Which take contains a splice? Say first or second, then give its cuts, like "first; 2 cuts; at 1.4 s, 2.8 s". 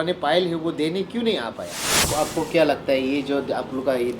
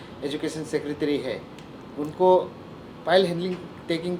first; 1 cut; at 1.9 s